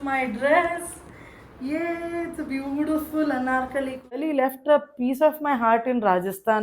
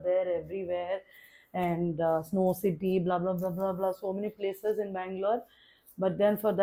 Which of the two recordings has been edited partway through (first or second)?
first